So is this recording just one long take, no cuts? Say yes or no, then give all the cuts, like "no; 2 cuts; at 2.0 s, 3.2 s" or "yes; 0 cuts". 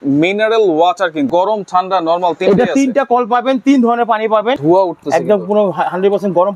no; 2 cuts; at 1.3 s, 4.6 s